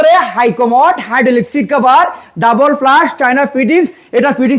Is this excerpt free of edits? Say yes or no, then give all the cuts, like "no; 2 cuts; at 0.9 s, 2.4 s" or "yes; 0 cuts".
yes; 0 cuts